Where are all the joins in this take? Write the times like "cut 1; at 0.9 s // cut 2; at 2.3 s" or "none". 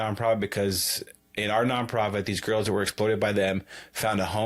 none